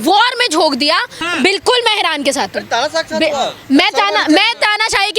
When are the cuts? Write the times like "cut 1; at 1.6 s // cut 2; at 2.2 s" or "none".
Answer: cut 1; at 1.2 s